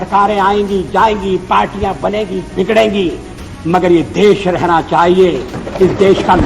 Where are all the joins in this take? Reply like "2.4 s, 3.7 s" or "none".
none